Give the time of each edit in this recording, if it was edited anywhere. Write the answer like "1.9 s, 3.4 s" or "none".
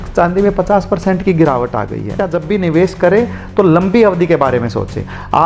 2.2 s